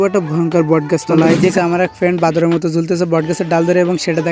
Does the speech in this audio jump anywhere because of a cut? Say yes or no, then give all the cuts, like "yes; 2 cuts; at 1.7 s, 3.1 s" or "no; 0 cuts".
yes; 1 cut; at 1.5 s